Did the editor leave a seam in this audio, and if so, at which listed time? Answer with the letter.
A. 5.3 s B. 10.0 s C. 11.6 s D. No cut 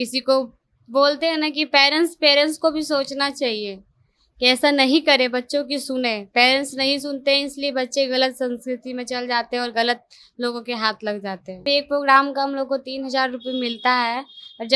C